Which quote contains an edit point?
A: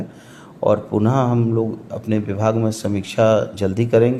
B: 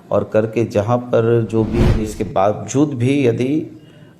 B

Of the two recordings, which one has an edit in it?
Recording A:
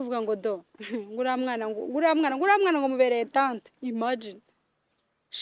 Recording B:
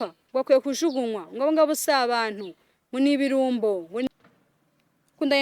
B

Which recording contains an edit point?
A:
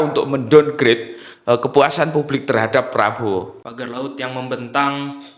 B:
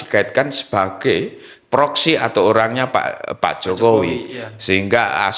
A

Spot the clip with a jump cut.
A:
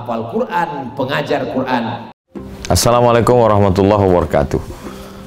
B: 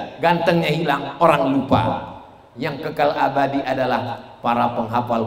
A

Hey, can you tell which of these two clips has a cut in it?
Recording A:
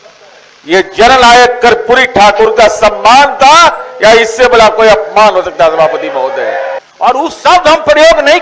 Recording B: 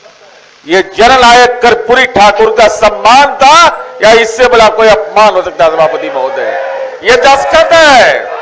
A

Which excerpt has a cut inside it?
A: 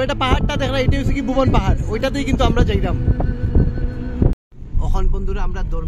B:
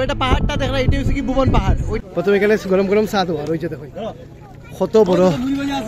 B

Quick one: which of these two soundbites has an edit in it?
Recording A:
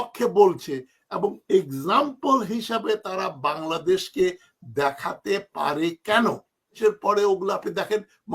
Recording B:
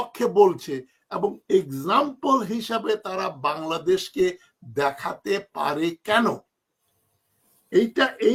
A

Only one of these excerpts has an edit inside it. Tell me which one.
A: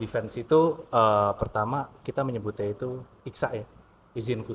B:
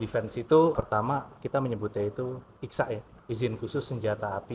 B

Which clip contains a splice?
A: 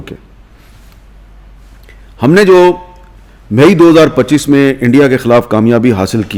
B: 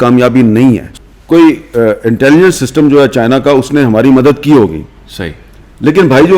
B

